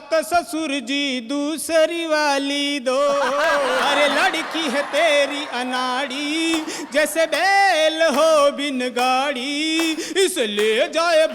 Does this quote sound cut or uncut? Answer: cut